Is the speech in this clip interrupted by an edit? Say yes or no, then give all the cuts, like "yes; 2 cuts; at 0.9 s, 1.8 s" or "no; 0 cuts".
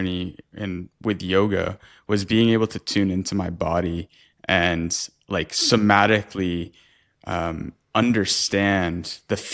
no; 0 cuts